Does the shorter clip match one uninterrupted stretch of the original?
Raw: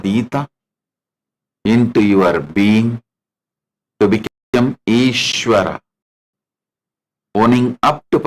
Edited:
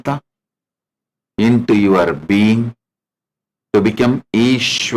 no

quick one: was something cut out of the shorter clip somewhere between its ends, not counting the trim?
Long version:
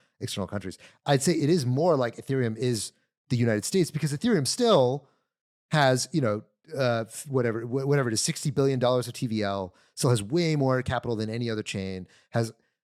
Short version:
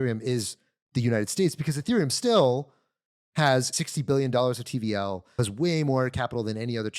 yes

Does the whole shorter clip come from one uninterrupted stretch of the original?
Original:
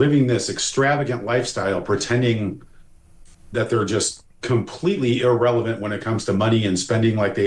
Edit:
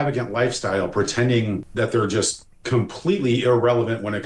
no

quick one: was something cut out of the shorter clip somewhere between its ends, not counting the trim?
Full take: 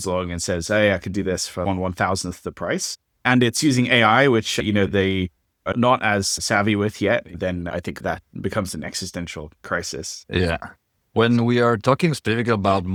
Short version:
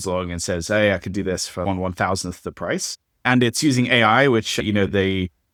no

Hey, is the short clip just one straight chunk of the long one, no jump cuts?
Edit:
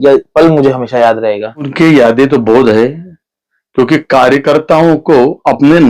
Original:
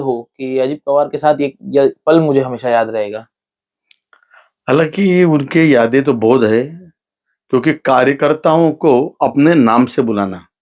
no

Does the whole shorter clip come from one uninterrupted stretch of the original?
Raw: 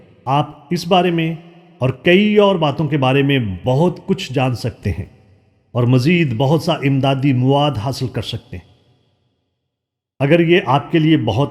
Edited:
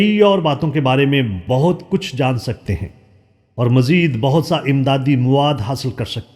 yes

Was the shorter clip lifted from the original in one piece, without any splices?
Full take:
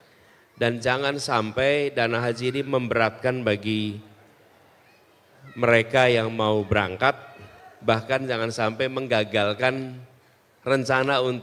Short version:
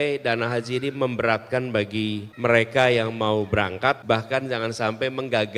no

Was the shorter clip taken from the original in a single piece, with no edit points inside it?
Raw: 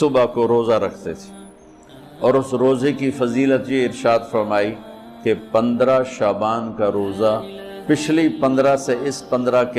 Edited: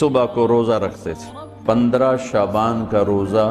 no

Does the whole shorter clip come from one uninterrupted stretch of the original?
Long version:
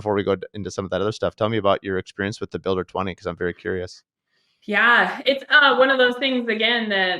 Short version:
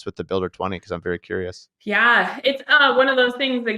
no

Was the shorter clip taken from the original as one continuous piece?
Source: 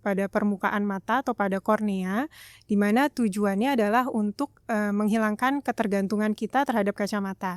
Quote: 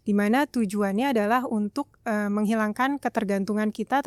yes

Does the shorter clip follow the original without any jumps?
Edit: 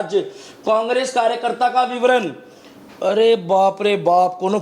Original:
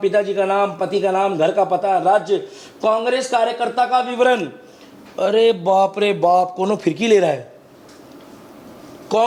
yes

